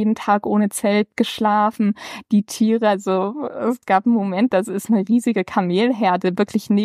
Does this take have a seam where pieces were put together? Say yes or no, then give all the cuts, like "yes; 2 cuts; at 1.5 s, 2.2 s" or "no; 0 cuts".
no; 0 cuts